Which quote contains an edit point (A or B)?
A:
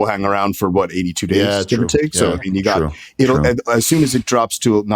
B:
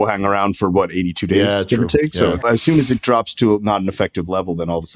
B